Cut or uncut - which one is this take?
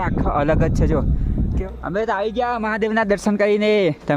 cut